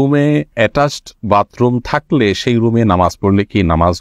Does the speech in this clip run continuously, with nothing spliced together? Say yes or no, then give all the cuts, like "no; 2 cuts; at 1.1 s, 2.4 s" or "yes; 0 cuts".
yes; 0 cuts